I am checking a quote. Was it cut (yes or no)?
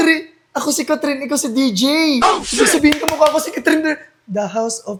no